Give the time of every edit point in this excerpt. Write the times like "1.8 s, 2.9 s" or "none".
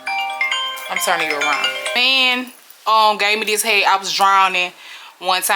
2.0 s